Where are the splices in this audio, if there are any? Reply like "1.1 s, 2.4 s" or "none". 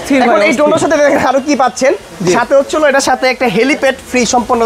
none